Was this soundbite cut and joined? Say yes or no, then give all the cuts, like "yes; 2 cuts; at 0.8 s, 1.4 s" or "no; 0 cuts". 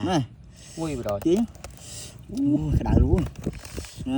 no; 0 cuts